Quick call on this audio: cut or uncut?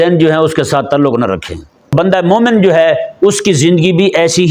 cut